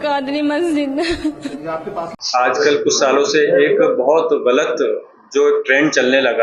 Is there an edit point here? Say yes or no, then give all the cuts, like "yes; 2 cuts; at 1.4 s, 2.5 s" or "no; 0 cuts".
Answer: yes; 1 cut; at 2.1 s